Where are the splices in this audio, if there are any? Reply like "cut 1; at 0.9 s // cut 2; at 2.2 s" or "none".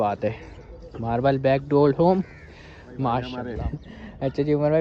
cut 1; at 3.4 s